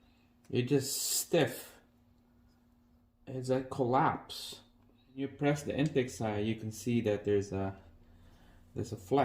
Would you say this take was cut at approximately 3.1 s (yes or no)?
yes